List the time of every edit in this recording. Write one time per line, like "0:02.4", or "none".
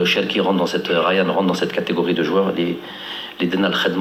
none